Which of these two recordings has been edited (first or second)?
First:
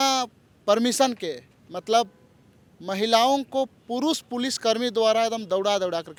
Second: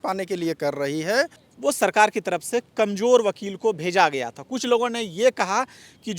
second